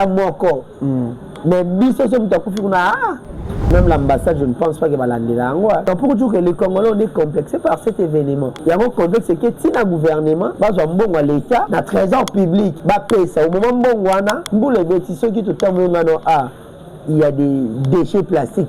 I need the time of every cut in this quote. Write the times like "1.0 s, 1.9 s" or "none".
3.7 s, 5.8 s, 8.5 s, 10.5 s, 11.7 s, 12.8 s, 14.4 s

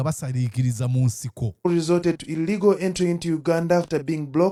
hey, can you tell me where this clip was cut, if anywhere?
none

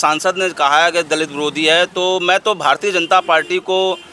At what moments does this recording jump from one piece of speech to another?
none

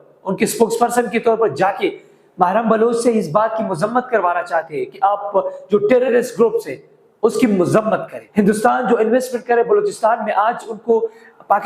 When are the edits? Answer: 8.2 s

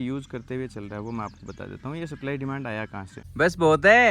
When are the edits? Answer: 3.2 s

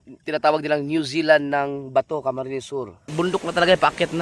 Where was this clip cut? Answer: 3.0 s

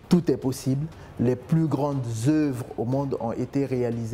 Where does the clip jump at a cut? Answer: none

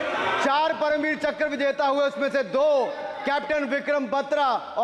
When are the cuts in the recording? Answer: none

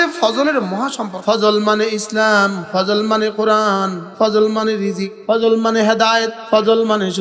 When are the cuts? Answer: 1.1 s, 2.6 s, 4.0 s, 5.1 s, 6.4 s

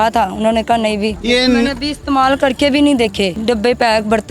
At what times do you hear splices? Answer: 1.2 s, 3.4 s

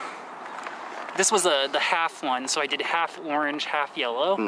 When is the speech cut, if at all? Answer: none

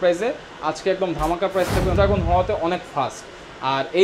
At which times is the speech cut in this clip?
1.9 s

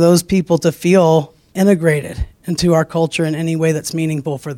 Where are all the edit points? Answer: 1.4 s

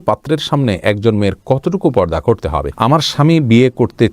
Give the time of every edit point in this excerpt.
2.7 s

